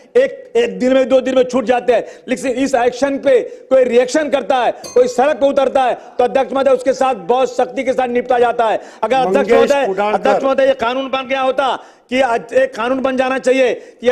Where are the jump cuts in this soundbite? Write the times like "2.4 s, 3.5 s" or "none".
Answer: none